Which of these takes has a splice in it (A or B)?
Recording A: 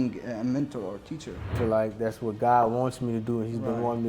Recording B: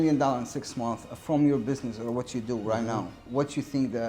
A